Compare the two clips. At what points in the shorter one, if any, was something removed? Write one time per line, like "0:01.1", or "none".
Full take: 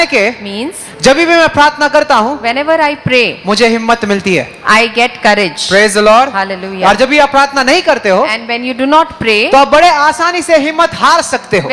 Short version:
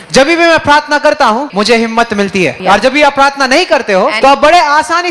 0:01.5
0:02.6
0:04.2